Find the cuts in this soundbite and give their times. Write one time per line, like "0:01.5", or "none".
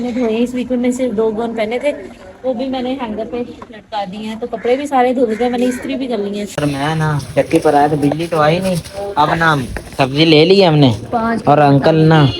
0:06.5